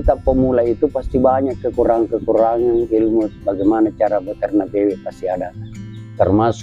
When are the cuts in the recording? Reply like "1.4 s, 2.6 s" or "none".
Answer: none

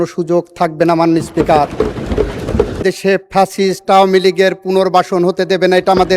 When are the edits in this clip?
2.8 s

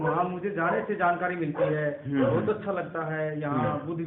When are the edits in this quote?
none

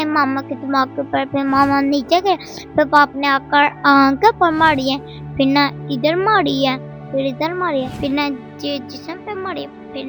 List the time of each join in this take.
none

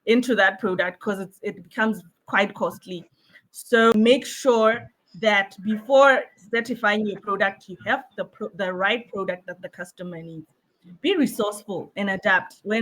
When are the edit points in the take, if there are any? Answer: 3.9 s

